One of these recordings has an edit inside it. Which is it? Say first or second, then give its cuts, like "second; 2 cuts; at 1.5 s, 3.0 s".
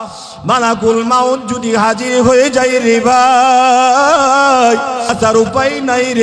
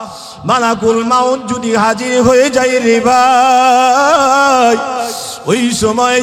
first; 1 cut; at 5.1 s